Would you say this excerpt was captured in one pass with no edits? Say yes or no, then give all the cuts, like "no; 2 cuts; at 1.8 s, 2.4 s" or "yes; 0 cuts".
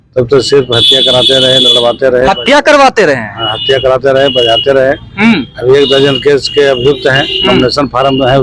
yes; 0 cuts